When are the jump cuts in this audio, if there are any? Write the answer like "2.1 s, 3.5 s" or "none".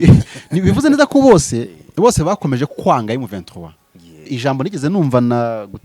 4.3 s